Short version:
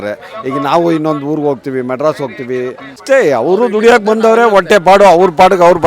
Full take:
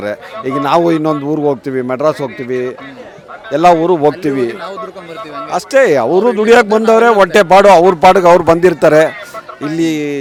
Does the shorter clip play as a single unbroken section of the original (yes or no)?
no